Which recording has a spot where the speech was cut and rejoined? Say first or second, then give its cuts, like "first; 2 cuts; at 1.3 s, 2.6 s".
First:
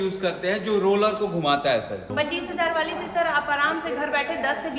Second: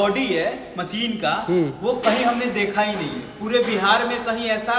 first; 1 cut; at 2.1 s